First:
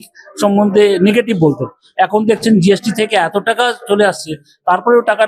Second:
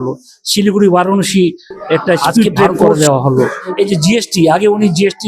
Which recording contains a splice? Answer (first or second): second